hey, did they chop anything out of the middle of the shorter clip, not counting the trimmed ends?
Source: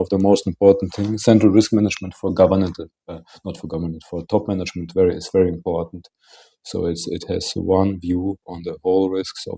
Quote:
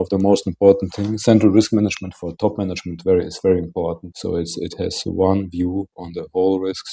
yes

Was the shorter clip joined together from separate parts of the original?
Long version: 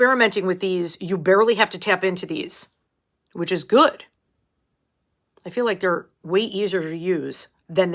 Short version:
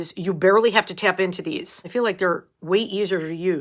yes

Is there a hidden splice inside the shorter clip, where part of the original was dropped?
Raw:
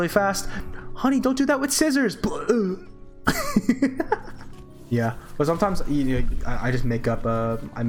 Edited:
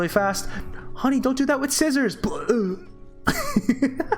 no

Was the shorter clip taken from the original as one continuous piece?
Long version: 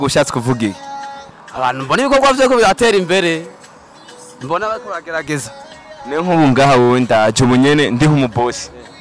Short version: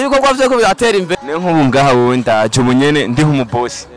no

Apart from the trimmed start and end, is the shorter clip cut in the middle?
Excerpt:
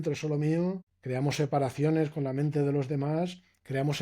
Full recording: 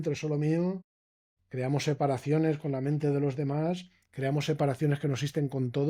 yes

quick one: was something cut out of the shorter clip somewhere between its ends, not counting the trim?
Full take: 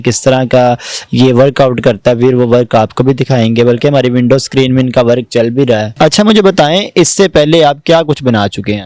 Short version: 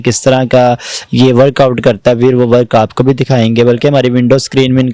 no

